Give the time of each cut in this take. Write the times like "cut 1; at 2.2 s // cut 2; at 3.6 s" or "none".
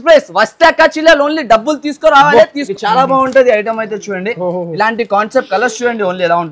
cut 1; at 2.7 s